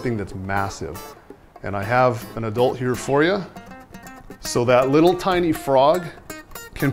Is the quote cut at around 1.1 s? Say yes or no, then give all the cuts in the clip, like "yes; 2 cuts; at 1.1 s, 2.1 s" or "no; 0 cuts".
no; 1 cut; at 4.4 s